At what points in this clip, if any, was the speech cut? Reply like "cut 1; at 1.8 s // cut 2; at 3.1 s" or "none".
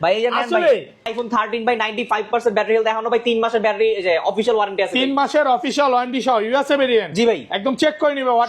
cut 1; at 1.1 s